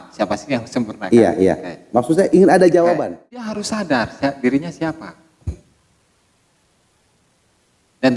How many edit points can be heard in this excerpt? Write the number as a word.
one